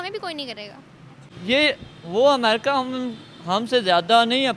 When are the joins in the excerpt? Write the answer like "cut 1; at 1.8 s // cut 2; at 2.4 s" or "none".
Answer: cut 1; at 1.3 s